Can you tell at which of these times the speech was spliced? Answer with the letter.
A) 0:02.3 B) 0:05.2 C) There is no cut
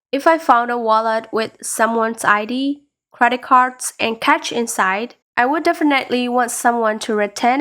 B